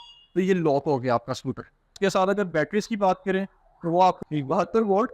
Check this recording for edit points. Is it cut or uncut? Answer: cut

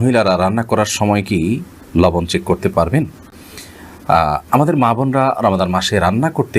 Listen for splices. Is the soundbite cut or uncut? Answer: uncut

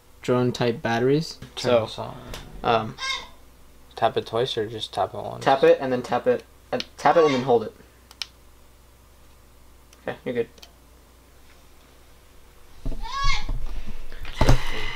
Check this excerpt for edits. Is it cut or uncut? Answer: cut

